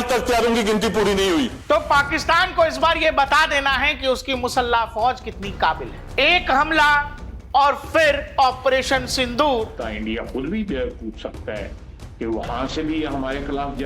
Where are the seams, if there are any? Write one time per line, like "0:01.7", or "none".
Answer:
0:01.6
0:06.0
0:09.8

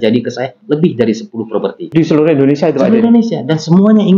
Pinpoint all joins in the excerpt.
0:01.8

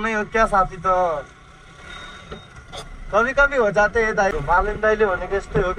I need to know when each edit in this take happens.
0:04.3

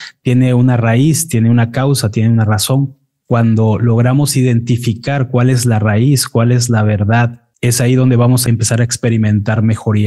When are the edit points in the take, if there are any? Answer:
0:07.4
0:08.4

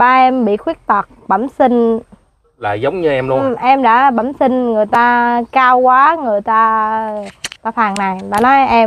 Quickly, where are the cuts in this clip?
0:03.4

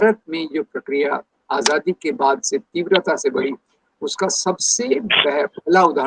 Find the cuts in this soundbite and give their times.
none

